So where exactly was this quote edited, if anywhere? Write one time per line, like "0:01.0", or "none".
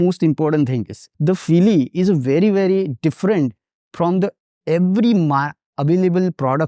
0:01.0